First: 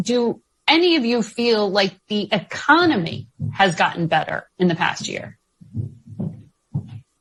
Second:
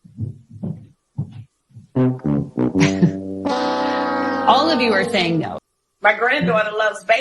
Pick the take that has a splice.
second; 1 cut; at 5.5 s

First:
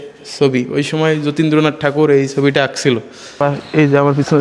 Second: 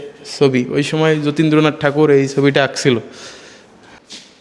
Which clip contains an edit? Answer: first; 1 cut; at 3.2 s

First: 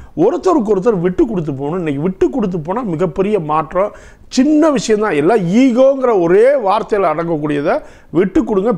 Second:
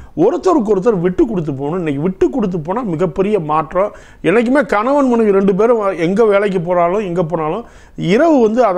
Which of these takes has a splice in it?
second; 1 cut; at 4.1 s

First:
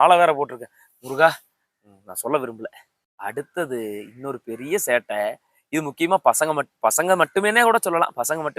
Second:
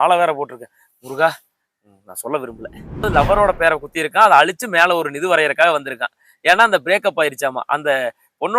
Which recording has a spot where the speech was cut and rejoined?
second; 1 cut; at 3.1 s

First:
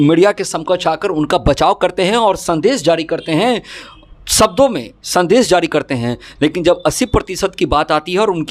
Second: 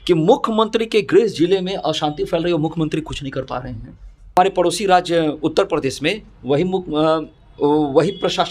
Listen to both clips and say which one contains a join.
second; 1 cut; at 4.3 s

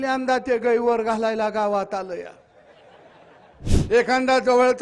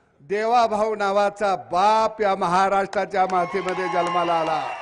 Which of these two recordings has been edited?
first; 1 cut; at 3.7 s

